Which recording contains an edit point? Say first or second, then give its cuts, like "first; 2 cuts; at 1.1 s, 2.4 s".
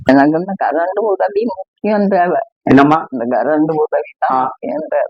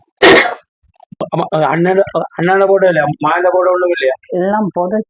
second; 1 cut; at 1.2 s